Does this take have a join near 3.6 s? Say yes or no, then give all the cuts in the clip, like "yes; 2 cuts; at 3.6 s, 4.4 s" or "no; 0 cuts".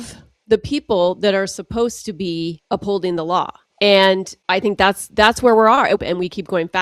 yes; 4 cuts; at 2.6 s, 3.6 s, 4.3 s, 6.0 s